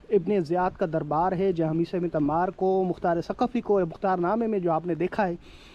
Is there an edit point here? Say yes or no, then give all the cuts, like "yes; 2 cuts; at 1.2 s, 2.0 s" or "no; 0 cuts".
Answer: no; 0 cuts